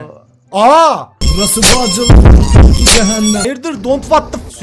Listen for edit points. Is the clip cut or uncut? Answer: uncut